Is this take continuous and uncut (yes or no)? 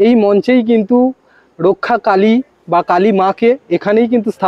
yes